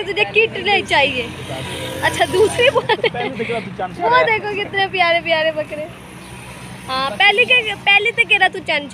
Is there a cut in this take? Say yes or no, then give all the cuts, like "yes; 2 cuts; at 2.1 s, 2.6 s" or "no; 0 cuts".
no; 0 cuts